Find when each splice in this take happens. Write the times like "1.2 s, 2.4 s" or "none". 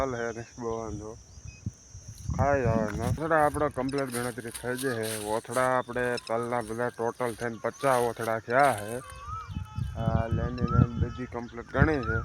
3.1 s